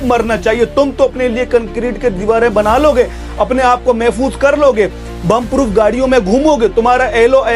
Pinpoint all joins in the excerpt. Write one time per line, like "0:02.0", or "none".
none